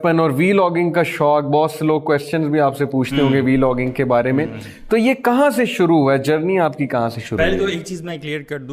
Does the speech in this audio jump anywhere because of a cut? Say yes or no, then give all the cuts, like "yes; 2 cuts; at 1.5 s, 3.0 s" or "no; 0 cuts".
no; 0 cuts